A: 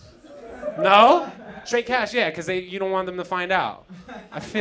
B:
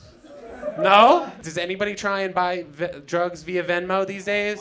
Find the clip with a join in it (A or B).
B